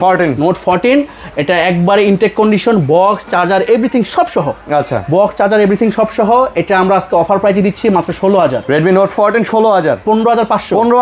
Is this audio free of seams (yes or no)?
yes